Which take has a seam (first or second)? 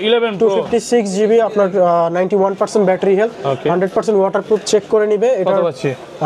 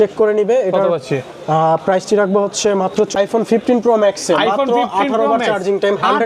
second